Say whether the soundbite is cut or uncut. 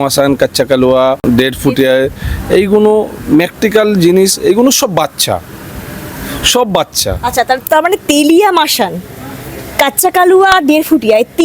cut